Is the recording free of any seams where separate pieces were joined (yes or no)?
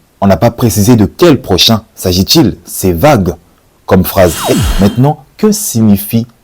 no